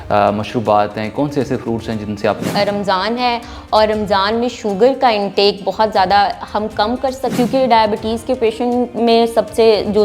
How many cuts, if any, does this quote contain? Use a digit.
2